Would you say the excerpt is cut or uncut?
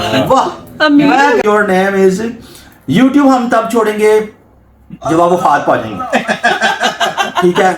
cut